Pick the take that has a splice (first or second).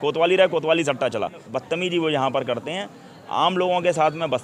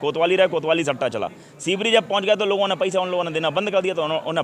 first